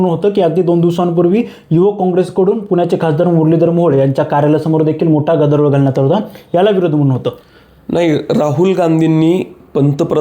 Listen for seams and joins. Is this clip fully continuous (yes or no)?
yes